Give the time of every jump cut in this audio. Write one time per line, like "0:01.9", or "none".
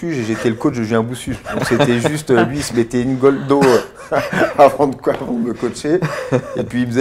none